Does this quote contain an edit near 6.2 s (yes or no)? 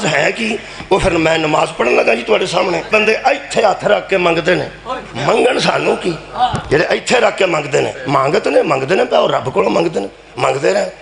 no